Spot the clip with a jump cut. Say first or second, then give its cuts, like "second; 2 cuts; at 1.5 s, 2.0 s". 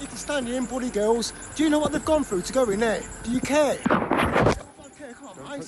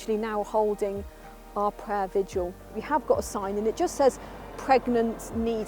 second; 1 cut; at 2.8 s